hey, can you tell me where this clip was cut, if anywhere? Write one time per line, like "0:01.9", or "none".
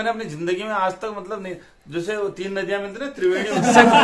none